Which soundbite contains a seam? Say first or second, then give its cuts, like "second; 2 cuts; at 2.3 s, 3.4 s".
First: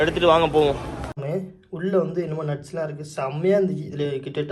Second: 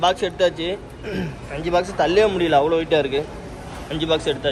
first; 1 cut; at 1.2 s